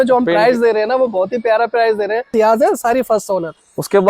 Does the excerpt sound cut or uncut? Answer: cut